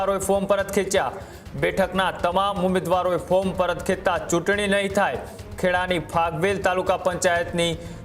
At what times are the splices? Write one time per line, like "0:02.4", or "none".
none